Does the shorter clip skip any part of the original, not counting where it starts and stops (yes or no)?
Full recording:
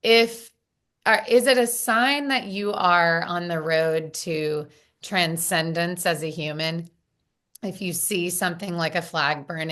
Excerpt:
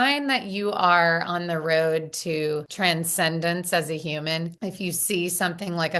yes